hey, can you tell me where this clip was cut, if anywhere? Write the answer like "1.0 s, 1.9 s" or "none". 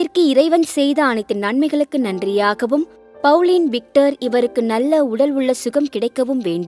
none